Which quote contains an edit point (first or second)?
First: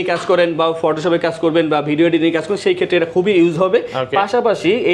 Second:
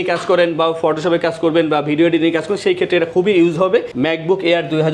second